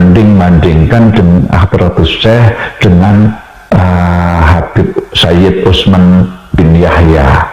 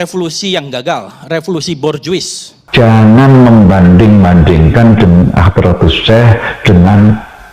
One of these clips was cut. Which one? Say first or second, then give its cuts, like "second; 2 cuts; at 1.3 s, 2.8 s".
second; 1 cut; at 2.6 s